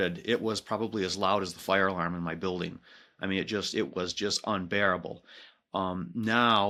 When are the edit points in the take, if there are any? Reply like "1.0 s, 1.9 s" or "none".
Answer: none